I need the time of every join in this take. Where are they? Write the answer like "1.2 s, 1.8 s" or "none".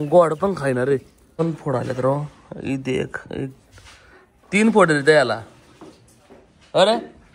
1.4 s